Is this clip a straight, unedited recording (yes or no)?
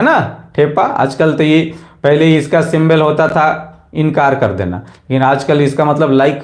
yes